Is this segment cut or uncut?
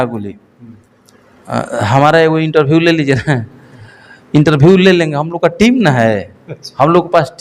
uncut